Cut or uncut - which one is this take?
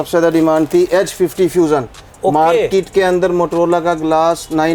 uncut